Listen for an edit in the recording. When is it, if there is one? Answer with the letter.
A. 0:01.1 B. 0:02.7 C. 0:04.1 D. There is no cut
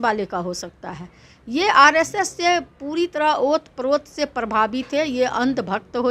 D